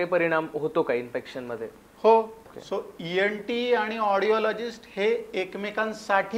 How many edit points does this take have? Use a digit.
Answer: 1